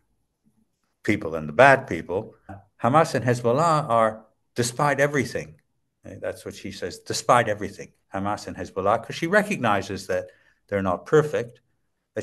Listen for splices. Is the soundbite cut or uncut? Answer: cut